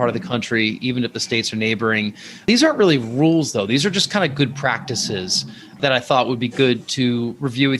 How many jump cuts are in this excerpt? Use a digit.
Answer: 2